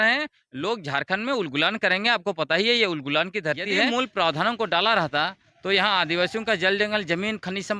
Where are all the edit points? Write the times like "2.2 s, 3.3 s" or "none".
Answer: 3.9 s